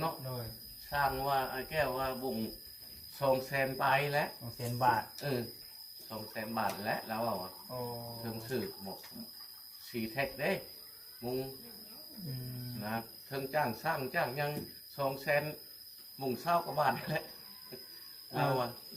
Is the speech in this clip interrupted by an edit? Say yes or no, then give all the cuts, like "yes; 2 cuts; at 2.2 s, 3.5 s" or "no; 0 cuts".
no; 0 cuts